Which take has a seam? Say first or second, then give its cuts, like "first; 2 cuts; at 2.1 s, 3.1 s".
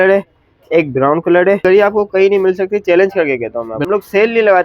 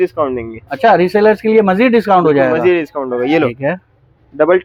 first; 2 cuts; at 1.6 s, 3.8 s